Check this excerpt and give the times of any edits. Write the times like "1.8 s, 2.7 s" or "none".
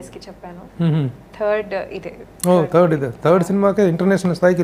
none